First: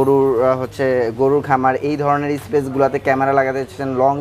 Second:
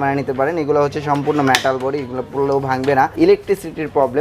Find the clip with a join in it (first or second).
second